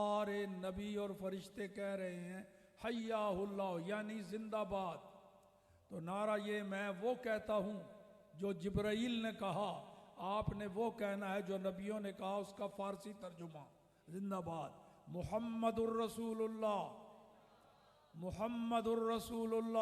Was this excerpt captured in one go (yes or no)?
yes